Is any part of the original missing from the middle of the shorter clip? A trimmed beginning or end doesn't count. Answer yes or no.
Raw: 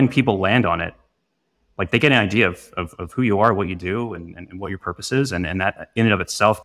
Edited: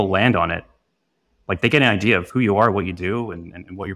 yes